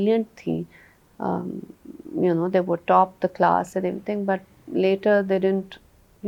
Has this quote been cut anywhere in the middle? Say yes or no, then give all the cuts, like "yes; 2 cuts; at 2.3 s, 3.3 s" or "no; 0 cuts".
no; 0 cuts